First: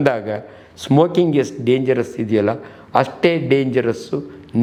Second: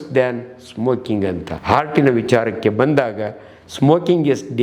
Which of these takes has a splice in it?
second; 1 cut; at 1.5 s

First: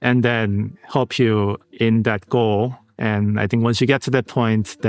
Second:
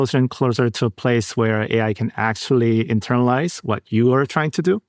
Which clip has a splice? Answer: first; 2 cuts; at 1.6 s, 2.9 s

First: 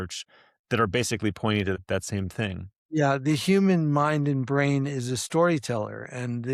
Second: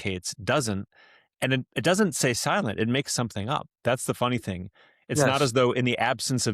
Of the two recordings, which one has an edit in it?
first; 1 cut; at 1.8 s

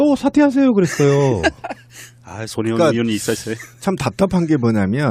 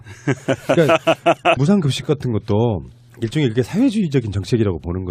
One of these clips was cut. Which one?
second; 1 cut; at 4.1 s

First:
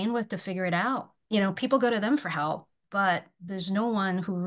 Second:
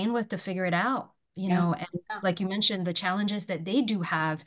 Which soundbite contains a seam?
first; 1 cut; at 1.1 s

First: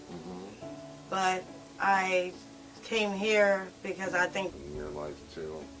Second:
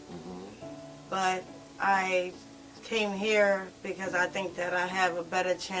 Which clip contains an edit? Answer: second; 1 cut; at 4.5 s

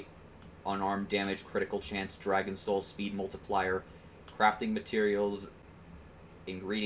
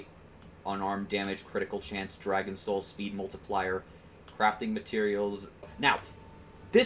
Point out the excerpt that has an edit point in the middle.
second; 1 cut; at 5.7 s

